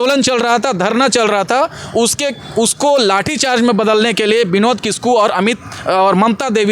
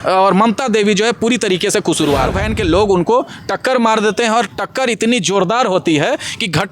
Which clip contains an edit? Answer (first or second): second